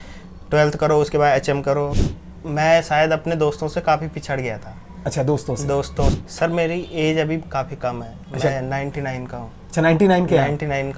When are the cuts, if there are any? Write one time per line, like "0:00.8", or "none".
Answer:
0:02.0
0:06.1